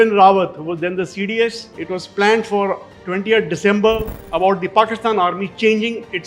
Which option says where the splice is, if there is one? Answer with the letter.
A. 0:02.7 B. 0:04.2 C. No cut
B